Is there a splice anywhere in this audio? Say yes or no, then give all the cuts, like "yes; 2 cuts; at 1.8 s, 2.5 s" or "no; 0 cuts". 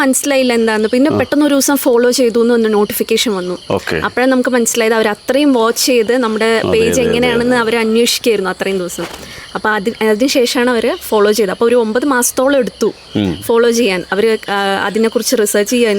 no; 0 cuts